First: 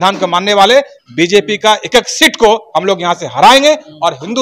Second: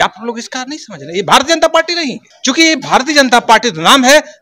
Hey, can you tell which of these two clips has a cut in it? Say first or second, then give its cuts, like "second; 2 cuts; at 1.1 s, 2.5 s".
second; 1 cut; at 2.2 s